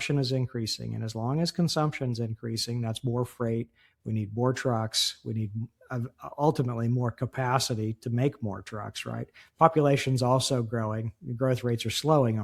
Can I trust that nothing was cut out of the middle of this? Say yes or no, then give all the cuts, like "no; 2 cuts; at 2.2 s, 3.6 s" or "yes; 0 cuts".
yes; 0 cuts